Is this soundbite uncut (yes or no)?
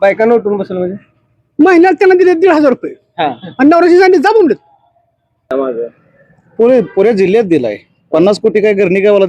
no